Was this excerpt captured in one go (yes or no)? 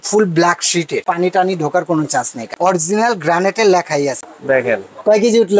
no